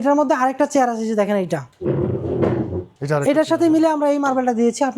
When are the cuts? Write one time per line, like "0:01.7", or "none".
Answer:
0:01.7
0:02.9